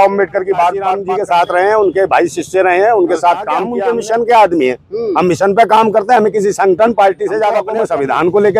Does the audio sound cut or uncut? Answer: cut